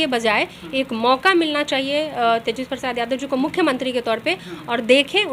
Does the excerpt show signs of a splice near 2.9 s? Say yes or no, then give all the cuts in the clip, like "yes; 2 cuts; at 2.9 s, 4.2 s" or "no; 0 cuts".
no; 0 cuts